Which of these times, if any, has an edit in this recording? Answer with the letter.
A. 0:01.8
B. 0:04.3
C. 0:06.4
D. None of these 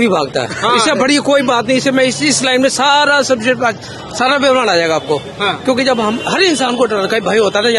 D